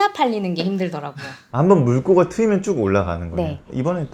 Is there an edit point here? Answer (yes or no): no